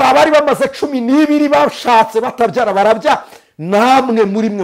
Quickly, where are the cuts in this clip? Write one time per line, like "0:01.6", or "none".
none